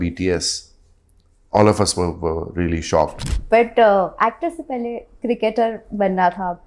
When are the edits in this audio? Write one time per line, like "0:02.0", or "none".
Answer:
0:03.3